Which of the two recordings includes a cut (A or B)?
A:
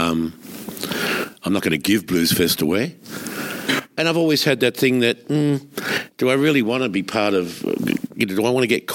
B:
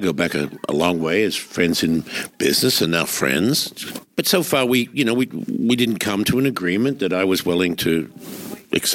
B